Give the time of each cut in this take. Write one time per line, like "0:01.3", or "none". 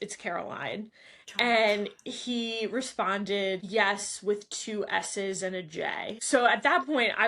0:03.6
0:06.2